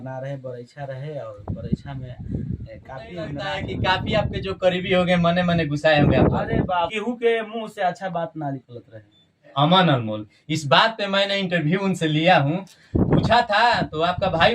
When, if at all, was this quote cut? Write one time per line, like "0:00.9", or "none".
0:03.4
0:06.9
0:09.5